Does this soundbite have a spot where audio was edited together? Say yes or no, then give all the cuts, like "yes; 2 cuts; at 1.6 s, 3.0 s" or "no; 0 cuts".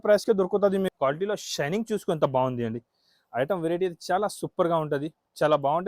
yes; 1 cut; at 0.9 s